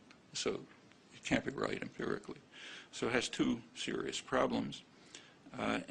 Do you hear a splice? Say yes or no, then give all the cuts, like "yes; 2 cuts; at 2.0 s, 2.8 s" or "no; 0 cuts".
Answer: no; 0 cuts